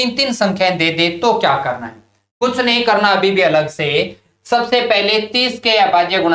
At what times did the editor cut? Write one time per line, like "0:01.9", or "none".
none

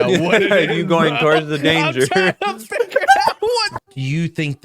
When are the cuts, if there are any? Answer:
0:03.7

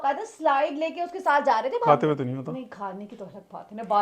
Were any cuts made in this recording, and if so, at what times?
0:01.8

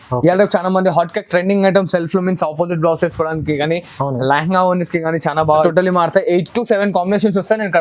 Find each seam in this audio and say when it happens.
0:05.6

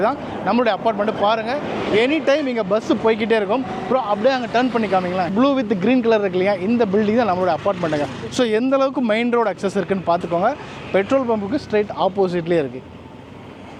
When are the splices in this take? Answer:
none

